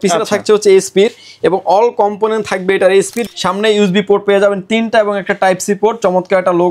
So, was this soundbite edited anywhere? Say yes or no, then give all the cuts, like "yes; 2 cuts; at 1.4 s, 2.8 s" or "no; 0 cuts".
yes; 1 cut; at 3.2 s